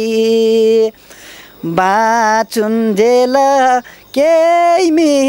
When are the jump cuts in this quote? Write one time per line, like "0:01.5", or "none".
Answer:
none